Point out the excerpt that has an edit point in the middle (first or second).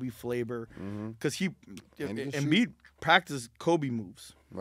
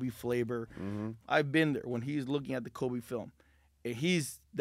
second